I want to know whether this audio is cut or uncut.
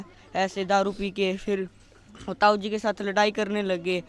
uncut